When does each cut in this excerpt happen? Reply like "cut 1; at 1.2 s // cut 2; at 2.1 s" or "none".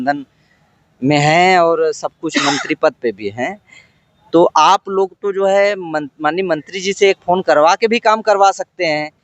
none